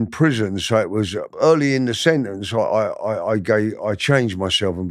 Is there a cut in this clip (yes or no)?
yes